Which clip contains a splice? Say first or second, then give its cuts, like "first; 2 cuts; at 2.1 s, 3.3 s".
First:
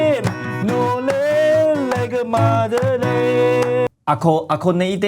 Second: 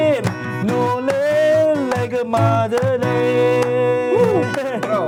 first; 1 cut; at 3.9 s